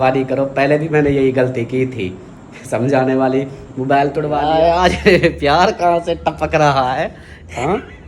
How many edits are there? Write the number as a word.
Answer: one